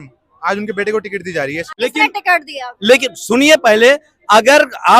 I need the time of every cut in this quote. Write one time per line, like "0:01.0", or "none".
none